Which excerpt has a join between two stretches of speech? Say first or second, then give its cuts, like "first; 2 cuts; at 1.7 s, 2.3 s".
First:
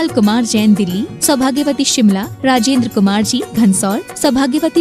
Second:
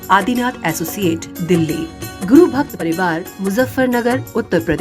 second; 1 cut; at 2.8 s